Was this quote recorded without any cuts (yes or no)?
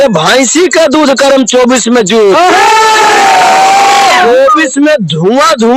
yes